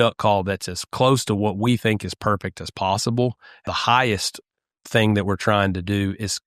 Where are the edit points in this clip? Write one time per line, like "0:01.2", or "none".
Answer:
0:03.5